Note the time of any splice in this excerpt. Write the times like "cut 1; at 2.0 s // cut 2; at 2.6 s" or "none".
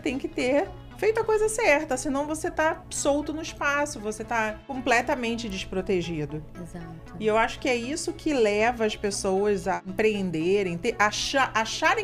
cut 1; at 4.6 s // cut 2; at 9.8 s